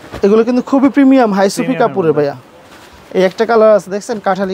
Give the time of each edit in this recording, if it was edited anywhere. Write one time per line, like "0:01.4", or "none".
none